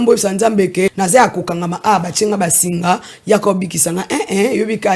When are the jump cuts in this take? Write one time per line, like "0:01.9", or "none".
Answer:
0:00.9

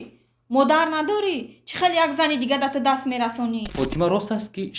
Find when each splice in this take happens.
0:03.7

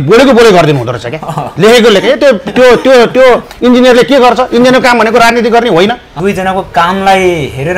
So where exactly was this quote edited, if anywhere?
0:06.1

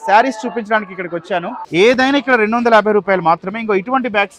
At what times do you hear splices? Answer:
0:01.6

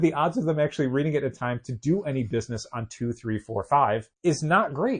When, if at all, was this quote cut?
0:04.1

